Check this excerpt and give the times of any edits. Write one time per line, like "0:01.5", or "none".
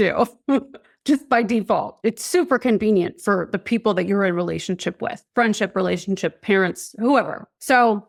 none